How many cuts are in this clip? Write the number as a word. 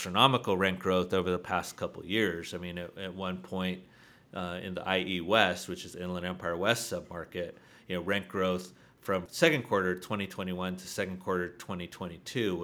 one